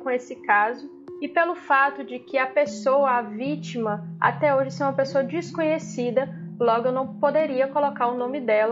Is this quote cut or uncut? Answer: uncut